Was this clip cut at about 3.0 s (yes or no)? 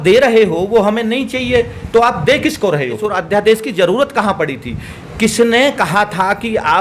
yes